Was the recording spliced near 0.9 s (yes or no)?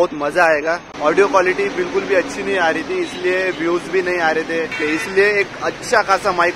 yes